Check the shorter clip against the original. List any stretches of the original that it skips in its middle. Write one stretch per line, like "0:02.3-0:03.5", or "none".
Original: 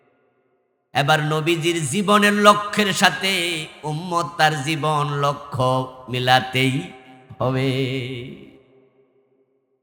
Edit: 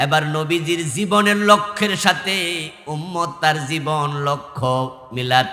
none